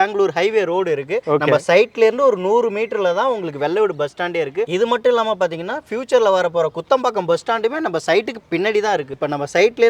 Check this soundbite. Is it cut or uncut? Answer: cut